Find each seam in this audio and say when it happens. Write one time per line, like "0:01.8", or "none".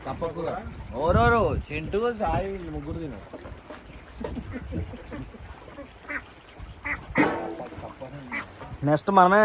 none